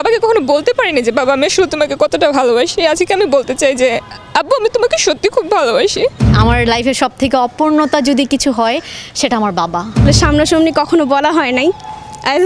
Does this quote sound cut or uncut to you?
cut